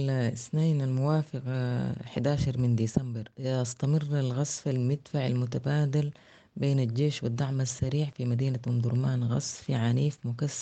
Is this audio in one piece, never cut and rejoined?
no; 1 cut; at 3.2 s

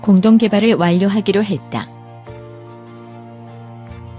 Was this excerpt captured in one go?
no; 1 cut; at 1.9 s

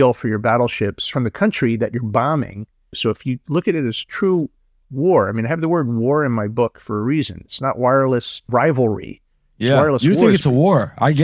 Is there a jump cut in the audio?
yes; 3 cuts; at 1.0 s, 3.0 s, 8.5 s

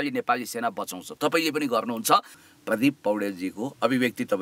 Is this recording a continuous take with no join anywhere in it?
no; 1 cut; at 2.4 s

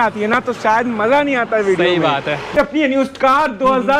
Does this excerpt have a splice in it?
yes; 1 cut; at 2.5 s

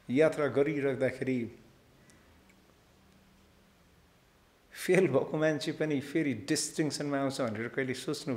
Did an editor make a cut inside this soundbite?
no; 0 cuts

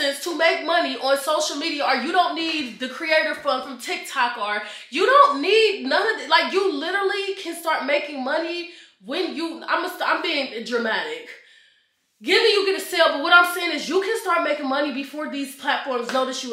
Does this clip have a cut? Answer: no; 0 cuts

